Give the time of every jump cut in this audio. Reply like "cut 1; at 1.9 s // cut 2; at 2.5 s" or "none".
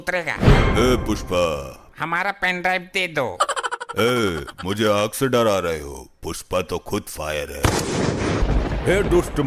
cut 1; at 1.8 s // cut 2; at 8.4 s